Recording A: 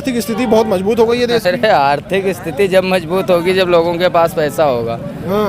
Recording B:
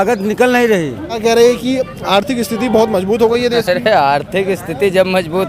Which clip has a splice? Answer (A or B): B